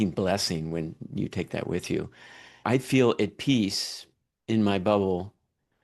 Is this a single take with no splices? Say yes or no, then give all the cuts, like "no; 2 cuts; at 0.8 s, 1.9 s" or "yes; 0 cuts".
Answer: no; 1 cut; at 2.6 s